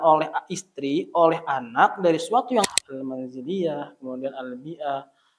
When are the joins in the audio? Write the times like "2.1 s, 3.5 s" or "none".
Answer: 2.7 s